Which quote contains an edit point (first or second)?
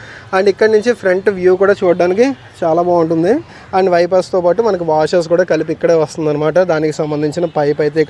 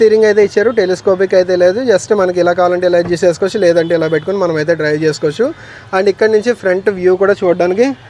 first